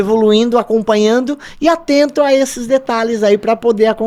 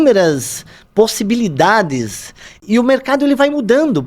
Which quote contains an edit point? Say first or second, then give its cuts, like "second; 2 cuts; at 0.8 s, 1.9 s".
second; 1 cut; at 2.5 s